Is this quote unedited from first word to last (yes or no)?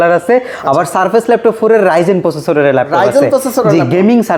yes